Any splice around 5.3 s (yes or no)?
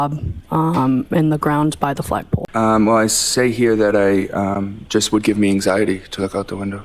no